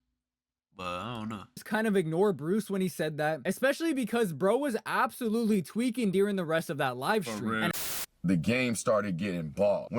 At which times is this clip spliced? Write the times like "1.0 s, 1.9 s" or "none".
7.8 s